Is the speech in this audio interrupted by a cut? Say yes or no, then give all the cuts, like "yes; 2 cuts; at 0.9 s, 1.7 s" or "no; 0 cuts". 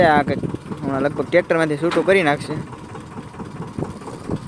no; 0 cuts